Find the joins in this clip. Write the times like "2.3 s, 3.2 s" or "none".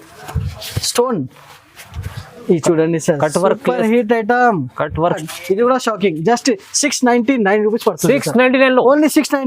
5.3 s